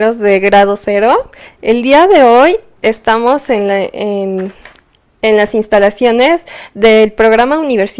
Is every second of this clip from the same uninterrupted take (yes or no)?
yes